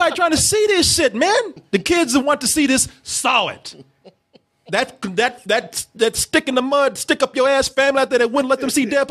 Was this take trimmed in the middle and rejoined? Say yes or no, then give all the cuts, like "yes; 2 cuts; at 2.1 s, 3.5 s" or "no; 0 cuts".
yes; 1 cut; at 1.6 s